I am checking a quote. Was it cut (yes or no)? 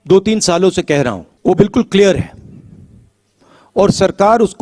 yes